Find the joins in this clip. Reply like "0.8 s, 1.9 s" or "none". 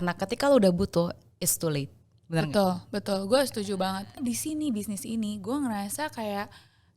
4.2 s

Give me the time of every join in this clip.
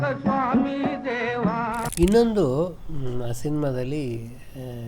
1.9 s

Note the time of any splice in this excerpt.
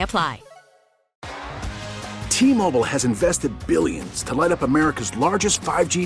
1.1 s

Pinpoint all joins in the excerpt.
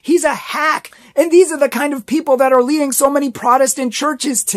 none

